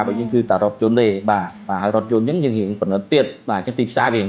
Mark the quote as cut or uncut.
cut